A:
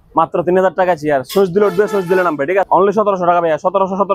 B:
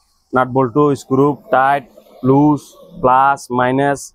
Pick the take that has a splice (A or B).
A